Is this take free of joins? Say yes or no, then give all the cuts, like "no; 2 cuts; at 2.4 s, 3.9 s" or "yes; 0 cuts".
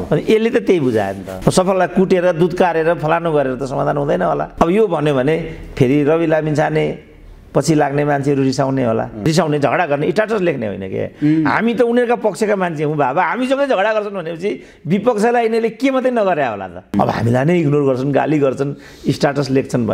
no; 3 cuts; at 1.2 s, 9.2 s, 16.9 s